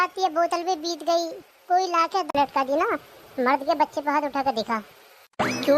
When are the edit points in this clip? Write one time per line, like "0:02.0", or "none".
0:02.3